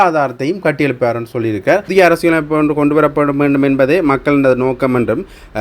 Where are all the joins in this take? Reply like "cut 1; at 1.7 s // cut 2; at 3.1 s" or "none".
cut 1; at 1.9 s

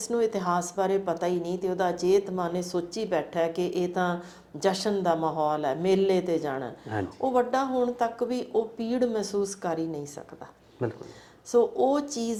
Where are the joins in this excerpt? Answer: none

